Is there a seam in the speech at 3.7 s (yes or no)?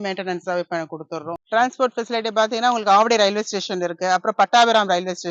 no